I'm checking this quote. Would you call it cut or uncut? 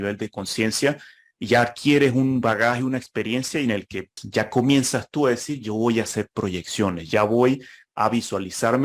cut